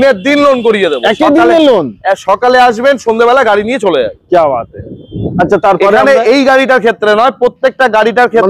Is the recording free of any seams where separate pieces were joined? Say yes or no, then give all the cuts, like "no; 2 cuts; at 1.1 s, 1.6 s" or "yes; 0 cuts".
yes; 0 cuts